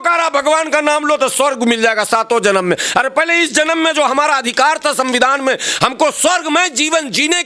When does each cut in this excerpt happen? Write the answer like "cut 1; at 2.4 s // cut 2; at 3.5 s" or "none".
none